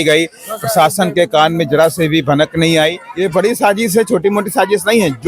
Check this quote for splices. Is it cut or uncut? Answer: cut